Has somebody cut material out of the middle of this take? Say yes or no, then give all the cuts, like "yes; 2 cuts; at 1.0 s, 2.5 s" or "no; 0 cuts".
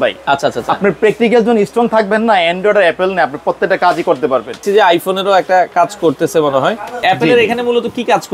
yes; 2 cuts; at 4.6 s, 7.0 s